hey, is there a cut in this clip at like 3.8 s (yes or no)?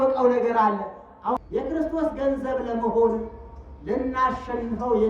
no